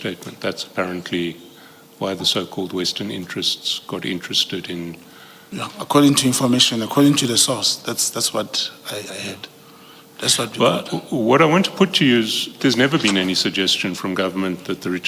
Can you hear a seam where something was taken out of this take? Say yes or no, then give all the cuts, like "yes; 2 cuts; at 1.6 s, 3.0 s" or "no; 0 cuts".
yes; 1 cut; at 12.6 s